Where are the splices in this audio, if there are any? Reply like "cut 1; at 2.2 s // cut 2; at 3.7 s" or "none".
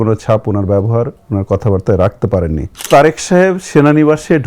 cut 1; at 2.9 s